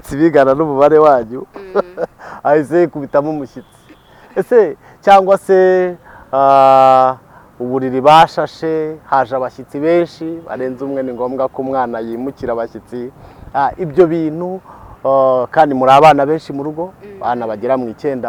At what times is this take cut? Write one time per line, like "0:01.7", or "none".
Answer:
none

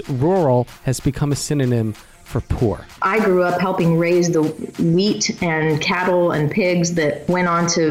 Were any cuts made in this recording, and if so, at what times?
0:02.9

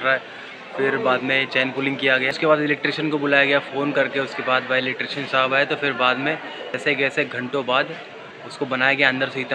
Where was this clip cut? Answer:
0:02.3
0:06.8

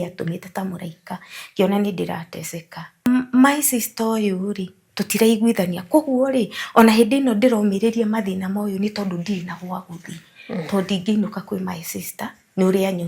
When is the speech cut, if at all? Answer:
0:03.1

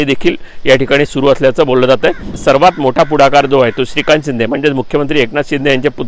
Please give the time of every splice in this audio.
0:02.3

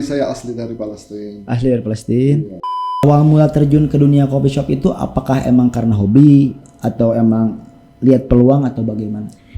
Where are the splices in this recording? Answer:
0:03.0

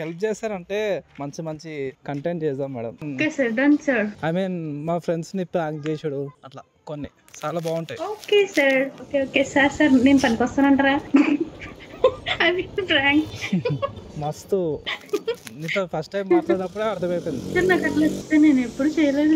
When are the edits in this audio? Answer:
0:03.0

